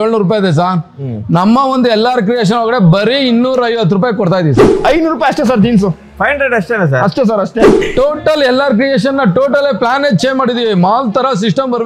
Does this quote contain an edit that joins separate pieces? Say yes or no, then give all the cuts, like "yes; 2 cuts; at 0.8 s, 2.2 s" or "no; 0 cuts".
yes; 2 cuts; at 4.7 s, 7.8 s